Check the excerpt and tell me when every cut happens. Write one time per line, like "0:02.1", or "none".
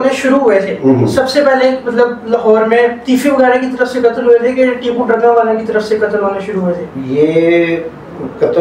none